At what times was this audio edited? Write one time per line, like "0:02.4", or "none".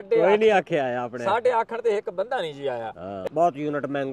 0:03.1